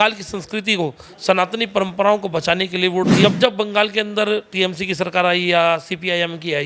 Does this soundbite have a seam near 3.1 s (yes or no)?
yes